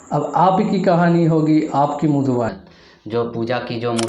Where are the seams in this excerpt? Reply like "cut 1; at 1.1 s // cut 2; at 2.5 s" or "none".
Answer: cut 1; at 2.5 s